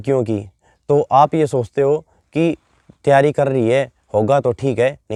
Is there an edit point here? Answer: no; 0 cuts

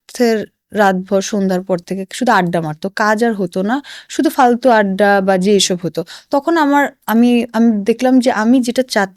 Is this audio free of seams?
yes; 0 cuts

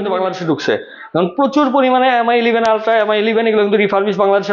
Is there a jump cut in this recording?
no; 0 cuts

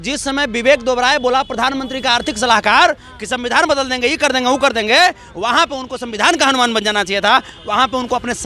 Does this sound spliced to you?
no; 0 cuts

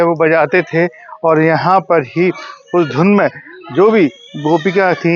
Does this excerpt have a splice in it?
no; 0 cuts

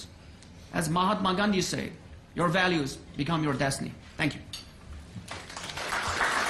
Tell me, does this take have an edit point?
yes; 1 cut; at 1.0 s

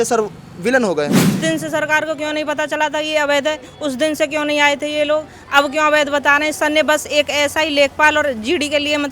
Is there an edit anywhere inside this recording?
yes; 1 cut; at 1.4 s

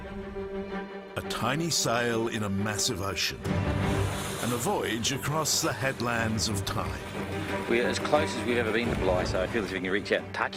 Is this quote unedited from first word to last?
yes; 0 cuts

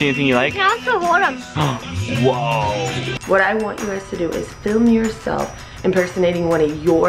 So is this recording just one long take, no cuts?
no; 1 cut; at 3.1 s

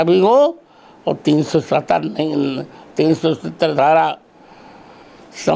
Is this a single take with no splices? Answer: yes; 0 cuts

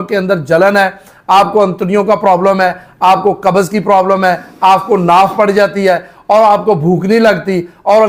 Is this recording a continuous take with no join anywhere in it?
yes; 0 cuts

